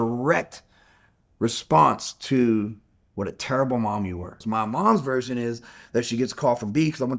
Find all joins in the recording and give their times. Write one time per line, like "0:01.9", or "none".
0:04.3